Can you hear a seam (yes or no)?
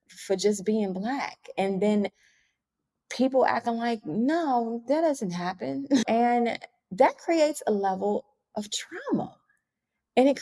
no